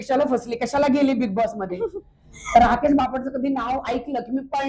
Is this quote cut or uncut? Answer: uncut